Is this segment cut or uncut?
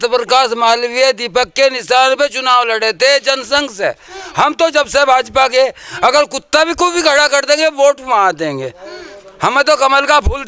uncut